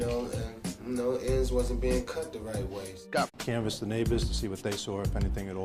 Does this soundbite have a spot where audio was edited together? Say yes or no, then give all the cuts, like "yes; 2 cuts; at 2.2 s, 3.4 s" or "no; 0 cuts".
no; 0 cuts